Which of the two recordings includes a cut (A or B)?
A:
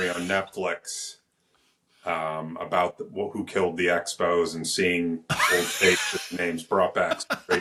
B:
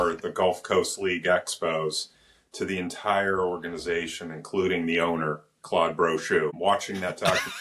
B